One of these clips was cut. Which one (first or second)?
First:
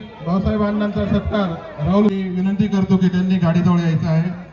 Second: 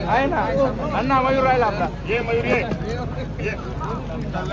first